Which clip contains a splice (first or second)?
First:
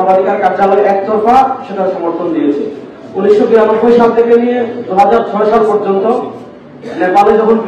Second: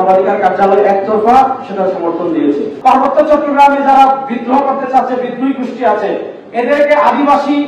second